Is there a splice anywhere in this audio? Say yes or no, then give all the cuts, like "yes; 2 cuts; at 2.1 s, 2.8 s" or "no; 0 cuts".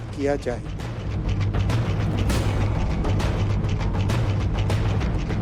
no; 0 cuts